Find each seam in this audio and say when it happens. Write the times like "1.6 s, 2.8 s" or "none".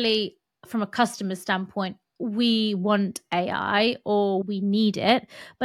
4.4 s